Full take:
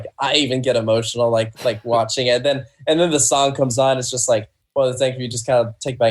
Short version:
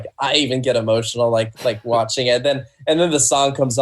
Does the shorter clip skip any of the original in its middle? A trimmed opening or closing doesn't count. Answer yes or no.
no